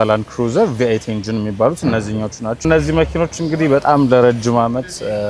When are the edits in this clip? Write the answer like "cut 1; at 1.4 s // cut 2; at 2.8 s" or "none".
cut 1; at 2.6 s